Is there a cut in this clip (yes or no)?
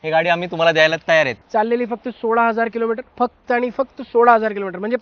yes